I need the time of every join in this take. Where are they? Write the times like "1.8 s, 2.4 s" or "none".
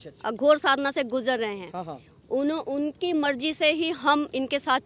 none